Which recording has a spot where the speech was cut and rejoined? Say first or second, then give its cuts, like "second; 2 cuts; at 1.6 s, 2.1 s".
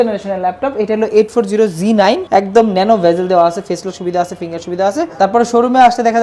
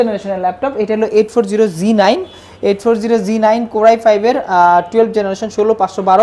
first; 2 cuts; at 2.2 s, 5.2 s